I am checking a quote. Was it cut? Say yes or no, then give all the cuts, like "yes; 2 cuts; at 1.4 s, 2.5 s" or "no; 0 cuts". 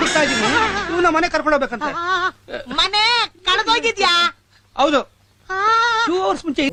no; 0 cuts